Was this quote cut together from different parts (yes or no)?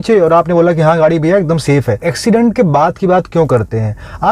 yes